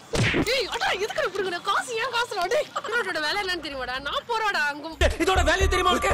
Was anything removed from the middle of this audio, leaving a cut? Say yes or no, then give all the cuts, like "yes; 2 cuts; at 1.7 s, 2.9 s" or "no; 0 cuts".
yes; 2 cuts; at 2.8 s, 4.9 s